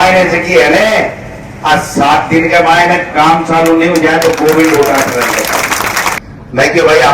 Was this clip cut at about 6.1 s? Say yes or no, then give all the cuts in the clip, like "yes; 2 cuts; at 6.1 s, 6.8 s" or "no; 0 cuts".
yes; 1 cut; at 6.1 s